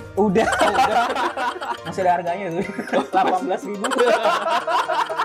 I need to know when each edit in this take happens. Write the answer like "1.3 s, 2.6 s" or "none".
none